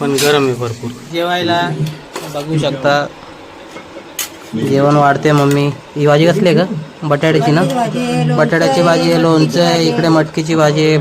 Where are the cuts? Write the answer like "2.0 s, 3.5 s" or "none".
1.1 s